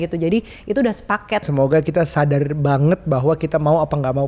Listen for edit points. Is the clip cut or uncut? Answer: cut